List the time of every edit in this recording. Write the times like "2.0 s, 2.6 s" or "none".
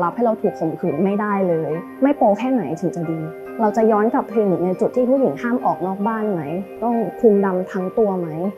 1.9 s, 3.4 s, 6.8 s

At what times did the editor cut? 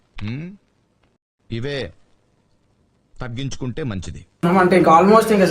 4.4 s

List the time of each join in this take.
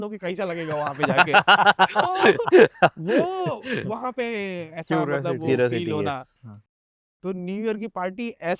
6.8 s

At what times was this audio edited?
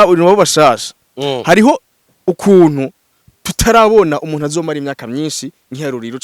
none

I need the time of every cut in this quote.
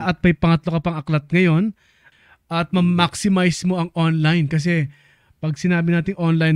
2.1 s

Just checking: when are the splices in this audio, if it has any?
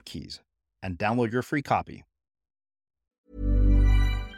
3.2 s

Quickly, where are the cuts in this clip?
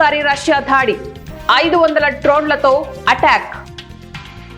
3.6 s

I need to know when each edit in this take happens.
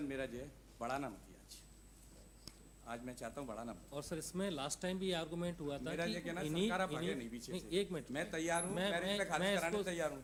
none

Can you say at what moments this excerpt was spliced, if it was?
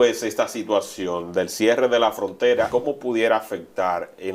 2.7 s

